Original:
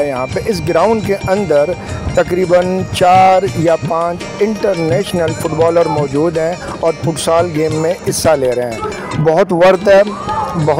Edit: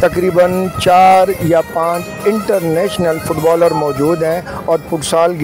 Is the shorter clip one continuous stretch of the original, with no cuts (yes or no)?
yes